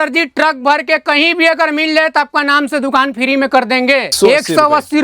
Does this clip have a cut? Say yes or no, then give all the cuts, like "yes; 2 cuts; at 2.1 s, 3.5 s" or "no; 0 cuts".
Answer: yes; 1 cut; at 4.1 s